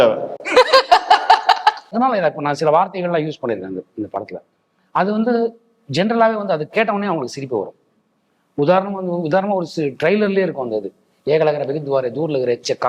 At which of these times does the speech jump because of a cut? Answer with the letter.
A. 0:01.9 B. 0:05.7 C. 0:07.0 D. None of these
A